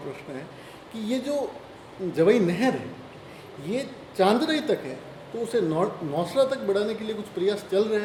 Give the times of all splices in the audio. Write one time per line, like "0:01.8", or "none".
none